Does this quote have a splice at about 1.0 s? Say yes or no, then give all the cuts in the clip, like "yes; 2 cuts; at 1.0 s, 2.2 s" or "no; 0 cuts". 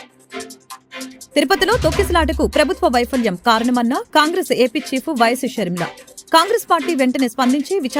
yes; 1 cut; at 1.0 s